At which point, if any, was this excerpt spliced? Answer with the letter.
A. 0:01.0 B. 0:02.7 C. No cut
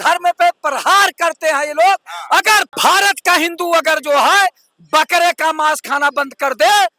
B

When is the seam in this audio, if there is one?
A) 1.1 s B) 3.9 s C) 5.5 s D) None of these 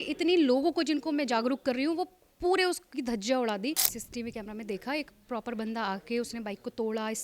B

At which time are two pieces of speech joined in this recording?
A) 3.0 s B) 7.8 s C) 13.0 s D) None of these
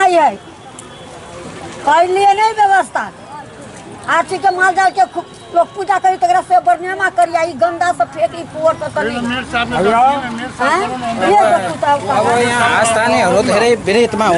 D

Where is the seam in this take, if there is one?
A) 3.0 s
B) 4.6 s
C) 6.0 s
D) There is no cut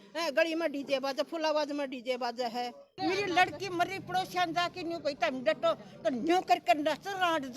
A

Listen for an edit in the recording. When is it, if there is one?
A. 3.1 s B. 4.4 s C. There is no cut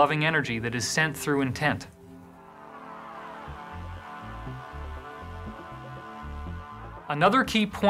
B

